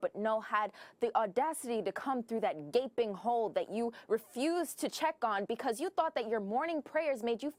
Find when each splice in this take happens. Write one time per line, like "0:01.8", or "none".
none